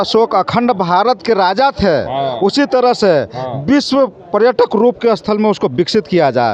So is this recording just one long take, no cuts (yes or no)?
yes